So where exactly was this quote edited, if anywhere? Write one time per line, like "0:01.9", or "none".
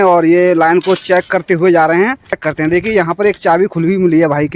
0:02.5